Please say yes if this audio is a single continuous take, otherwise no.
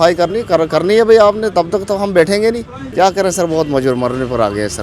no